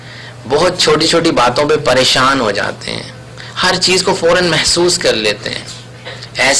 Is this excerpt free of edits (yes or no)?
yes